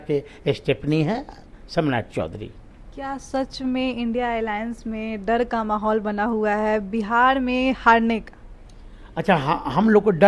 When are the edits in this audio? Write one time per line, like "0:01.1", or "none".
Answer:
none